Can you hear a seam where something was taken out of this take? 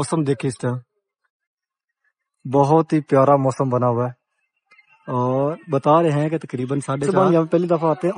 yes; 1 cut; at 7.0 s

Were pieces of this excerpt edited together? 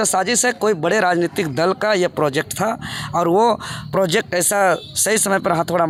no; 0 cuts

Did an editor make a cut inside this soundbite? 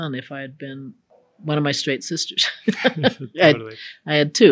no; 0 cuts

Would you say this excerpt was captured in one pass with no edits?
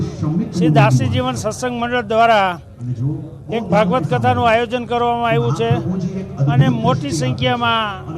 yes; 0 cuts

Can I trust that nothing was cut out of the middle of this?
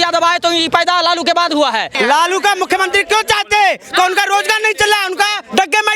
no; 1 cut; at 1.9 s

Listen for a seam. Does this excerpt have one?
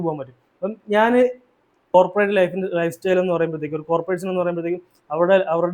yes; 1 cut; at 1.9 s

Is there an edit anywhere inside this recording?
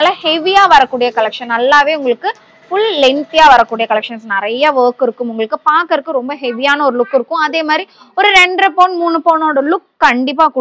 no; 0 cuts

